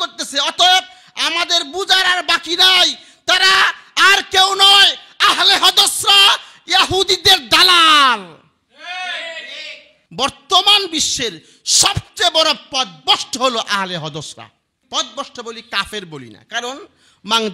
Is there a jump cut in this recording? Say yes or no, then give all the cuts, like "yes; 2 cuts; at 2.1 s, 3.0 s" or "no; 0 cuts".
yes; 2 cuts; at 10.0 s, 14.8 s